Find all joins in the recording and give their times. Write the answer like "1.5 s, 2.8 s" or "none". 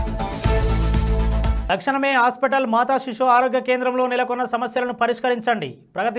1.6 s